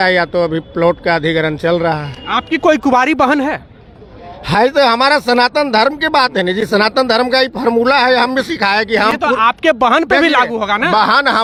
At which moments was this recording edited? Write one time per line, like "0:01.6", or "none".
none